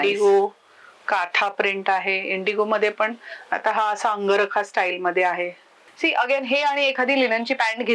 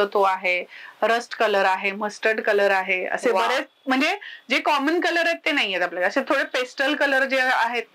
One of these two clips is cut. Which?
first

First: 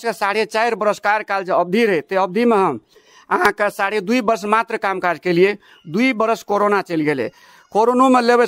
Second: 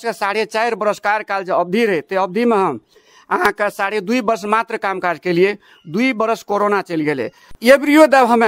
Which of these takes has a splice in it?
second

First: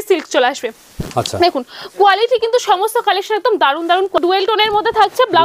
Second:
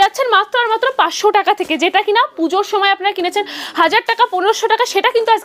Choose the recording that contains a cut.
first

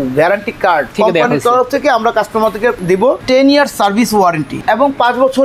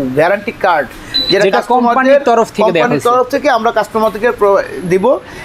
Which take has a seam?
first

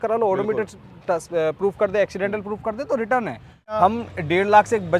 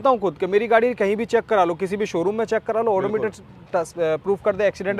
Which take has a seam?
first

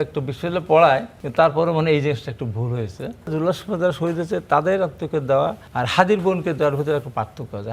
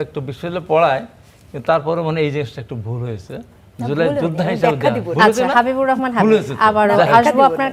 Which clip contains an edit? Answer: first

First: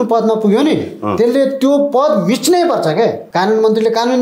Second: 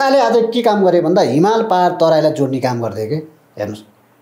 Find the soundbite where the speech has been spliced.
first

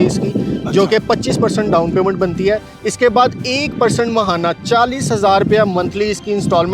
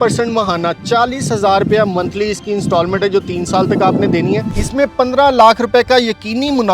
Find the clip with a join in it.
second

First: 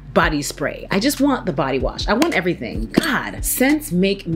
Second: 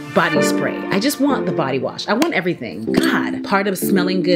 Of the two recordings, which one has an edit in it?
second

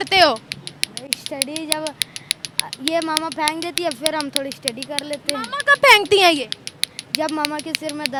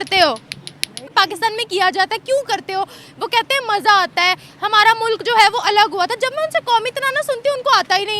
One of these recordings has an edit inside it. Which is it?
second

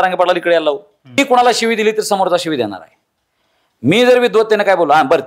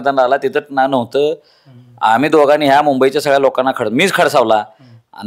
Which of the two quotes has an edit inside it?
first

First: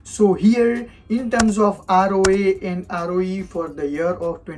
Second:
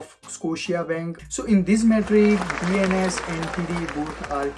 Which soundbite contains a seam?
second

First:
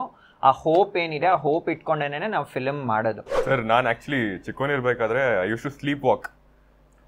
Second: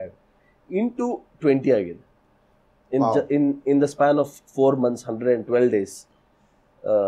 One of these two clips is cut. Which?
first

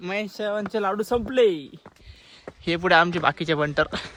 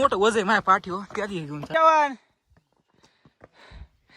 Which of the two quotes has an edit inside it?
second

